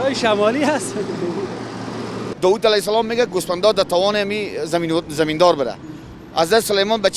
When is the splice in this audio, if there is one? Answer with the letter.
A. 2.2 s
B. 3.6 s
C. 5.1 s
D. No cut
A